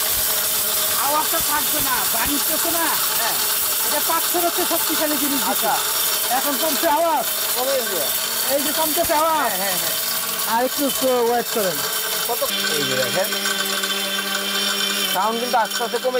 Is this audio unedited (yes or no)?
no